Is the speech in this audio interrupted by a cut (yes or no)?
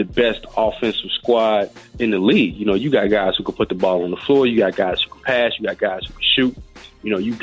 no